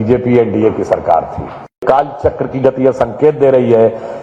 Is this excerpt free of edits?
no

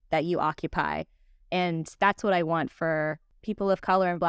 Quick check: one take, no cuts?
no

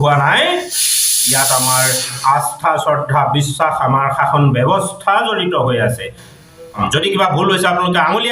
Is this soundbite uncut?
no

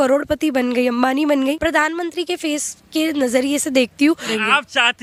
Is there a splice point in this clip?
no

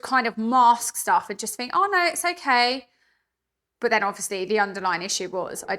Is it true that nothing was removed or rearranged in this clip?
yes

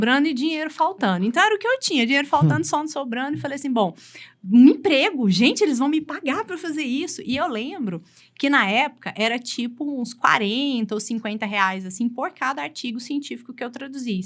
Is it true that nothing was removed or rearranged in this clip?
yes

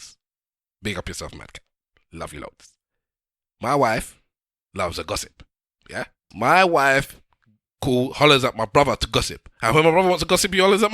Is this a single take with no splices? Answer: no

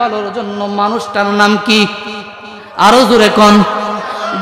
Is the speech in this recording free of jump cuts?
yes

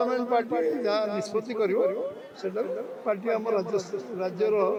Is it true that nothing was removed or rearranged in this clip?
yes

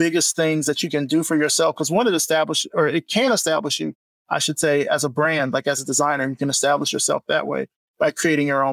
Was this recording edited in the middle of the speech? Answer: no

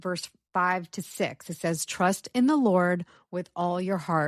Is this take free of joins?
yes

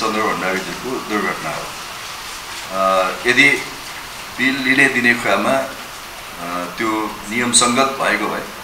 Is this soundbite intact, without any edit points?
yes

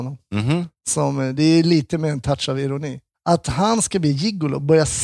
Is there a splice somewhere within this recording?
no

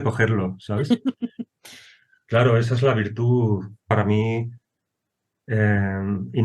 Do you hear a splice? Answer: yes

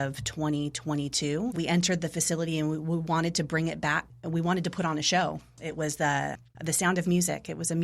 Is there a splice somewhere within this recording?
yes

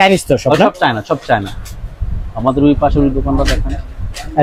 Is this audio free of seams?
yes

